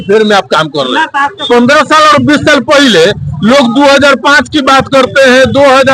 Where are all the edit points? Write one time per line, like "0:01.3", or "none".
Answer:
0:01.4